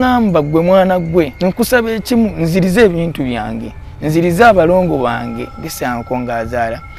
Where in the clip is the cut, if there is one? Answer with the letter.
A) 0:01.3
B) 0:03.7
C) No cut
A